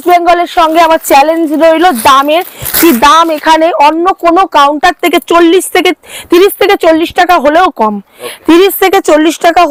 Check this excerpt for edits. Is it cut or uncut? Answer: uncut